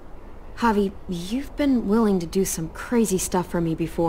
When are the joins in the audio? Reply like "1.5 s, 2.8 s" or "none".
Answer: 2.3 s